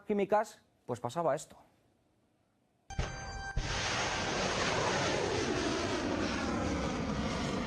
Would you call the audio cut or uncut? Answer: cut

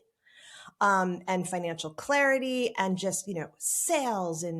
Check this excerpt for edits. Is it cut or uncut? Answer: uncut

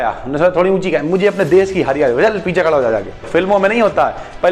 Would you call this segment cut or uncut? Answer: cut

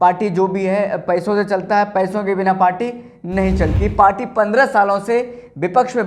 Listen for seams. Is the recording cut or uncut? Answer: cut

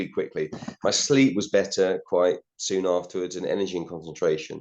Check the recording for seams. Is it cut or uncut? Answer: uncut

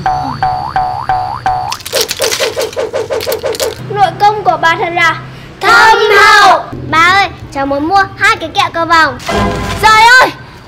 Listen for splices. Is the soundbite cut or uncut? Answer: cut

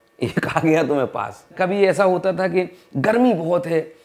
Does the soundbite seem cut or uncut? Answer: cut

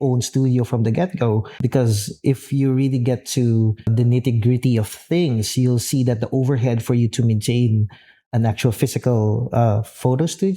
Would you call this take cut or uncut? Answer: cut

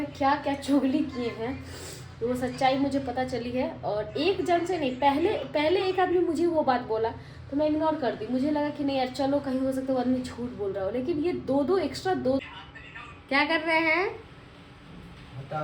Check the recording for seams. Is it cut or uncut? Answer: cut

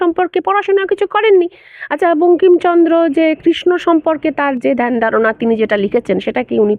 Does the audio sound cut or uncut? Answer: uncut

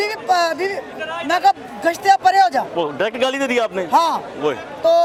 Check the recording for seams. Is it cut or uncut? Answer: uncut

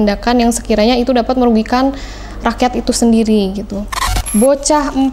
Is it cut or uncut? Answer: cut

